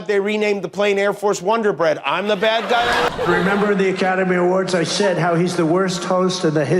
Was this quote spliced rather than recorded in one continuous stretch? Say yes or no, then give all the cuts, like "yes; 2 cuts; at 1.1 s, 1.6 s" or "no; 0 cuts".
yes; 1 cut; at 3.1 s